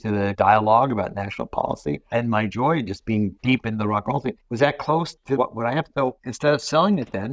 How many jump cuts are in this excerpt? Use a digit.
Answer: 3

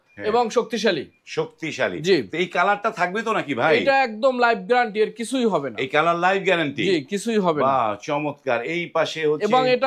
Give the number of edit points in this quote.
0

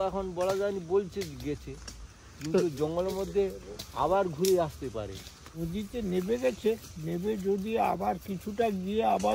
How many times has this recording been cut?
1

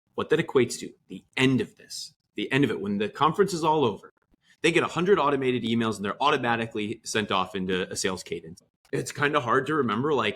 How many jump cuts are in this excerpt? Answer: 1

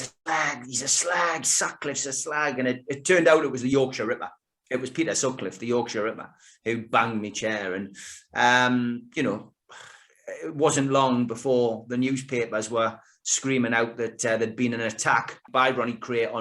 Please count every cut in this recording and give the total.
0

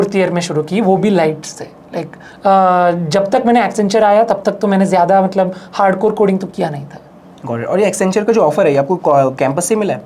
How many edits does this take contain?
0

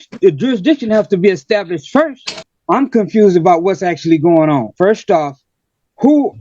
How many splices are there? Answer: 1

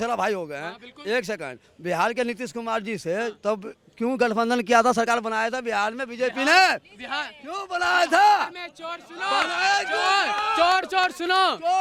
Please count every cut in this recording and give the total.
0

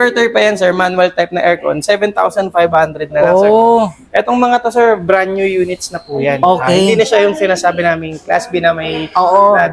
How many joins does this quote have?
0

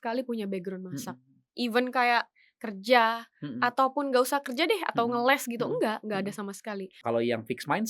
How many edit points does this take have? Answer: 1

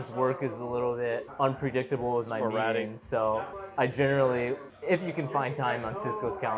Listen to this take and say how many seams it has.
3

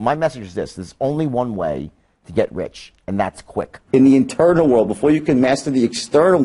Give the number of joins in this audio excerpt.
1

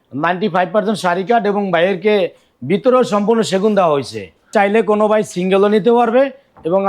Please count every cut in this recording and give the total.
1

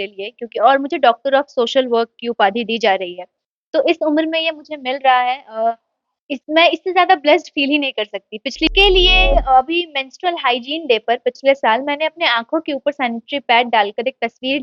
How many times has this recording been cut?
1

